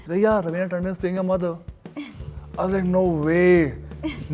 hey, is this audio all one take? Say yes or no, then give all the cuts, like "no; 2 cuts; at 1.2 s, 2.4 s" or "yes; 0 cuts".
yes; 0 cuts